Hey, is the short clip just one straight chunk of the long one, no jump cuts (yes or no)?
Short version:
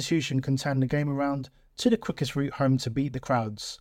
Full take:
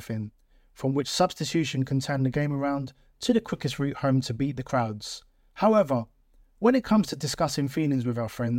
yes